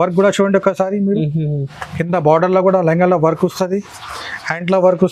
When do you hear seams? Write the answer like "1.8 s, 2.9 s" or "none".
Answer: none